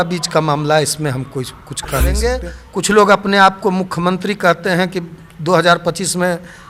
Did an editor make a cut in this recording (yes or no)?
yes